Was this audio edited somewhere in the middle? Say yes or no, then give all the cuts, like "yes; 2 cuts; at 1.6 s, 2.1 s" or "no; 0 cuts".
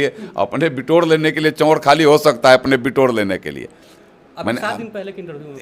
no; 0 cuts